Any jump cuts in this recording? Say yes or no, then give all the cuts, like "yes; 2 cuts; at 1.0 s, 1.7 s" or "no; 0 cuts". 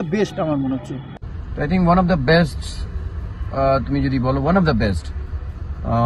yes; 1 cut; at 1.0 s